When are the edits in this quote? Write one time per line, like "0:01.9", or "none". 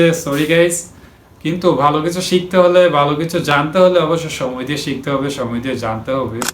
none